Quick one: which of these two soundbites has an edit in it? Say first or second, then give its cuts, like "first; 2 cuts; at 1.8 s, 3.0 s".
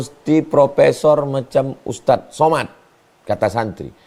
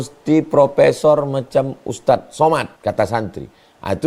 second; 1 cut; at 2.7 s